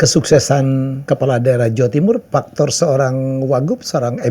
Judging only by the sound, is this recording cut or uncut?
cut